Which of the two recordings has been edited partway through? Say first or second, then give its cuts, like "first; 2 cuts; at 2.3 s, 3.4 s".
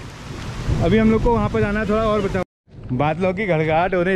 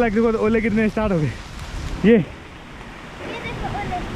first; 1 cut; at 2.4 s